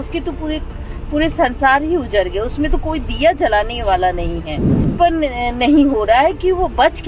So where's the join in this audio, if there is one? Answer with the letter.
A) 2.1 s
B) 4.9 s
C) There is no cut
B